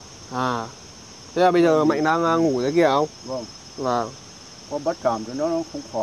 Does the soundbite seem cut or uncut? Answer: uncut